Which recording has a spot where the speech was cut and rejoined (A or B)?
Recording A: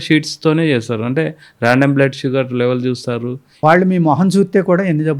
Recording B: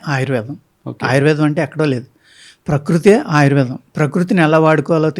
A